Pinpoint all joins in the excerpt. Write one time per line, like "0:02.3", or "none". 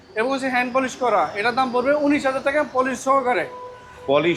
none